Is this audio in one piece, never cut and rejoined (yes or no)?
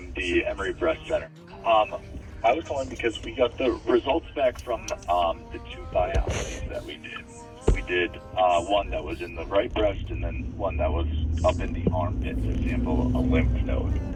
yes